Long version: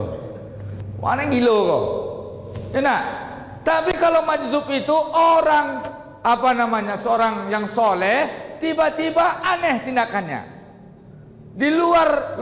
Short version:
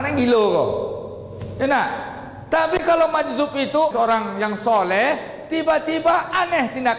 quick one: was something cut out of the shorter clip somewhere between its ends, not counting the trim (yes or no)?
yes